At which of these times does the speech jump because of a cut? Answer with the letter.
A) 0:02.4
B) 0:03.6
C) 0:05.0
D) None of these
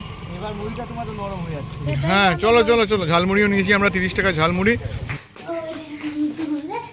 C